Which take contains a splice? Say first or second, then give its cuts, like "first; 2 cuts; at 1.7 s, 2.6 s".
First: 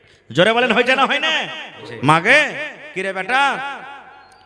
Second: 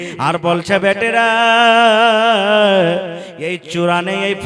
first; 1 cut; at 1.8 s